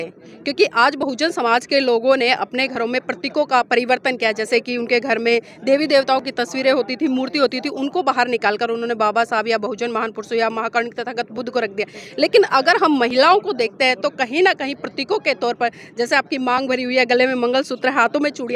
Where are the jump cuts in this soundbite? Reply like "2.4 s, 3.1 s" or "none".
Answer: none